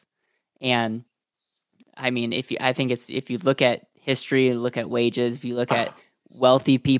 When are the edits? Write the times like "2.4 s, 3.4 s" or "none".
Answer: none